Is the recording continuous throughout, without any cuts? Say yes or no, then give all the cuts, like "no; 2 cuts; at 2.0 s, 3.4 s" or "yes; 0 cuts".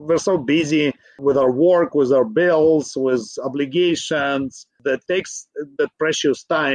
no; 1 cut; at 4.7 s